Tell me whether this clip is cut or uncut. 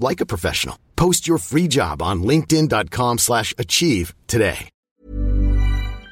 cut